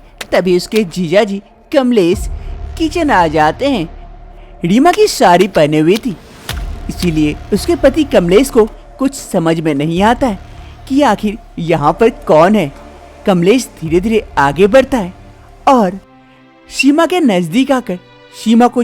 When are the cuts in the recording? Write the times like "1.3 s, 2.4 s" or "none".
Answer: 4.1 s